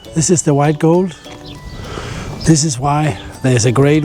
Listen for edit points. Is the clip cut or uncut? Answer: uncut